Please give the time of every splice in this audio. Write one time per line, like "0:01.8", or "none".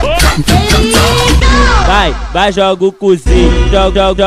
0:01.8